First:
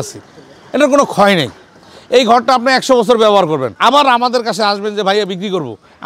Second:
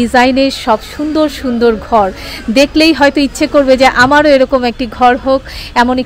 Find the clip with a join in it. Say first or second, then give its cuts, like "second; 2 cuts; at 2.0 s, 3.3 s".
first; 1 cut; at 3.7 s